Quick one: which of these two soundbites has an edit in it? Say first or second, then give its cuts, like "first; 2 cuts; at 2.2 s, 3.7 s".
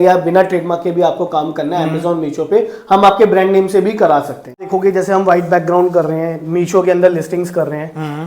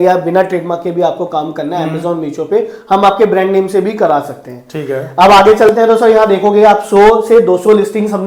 first; 1 cut; at 4.7 s